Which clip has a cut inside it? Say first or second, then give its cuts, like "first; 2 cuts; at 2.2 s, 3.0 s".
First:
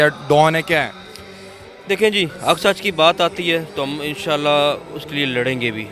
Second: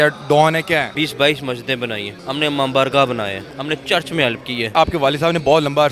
second; 4 cuts; at 0.9 s, 2.1 s, 3.5 s, 4.7 s